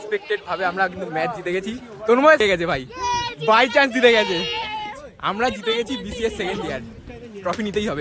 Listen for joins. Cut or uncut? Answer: cut